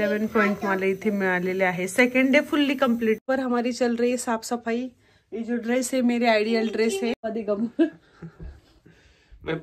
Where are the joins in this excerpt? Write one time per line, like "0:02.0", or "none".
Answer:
0:03.2
0:07.3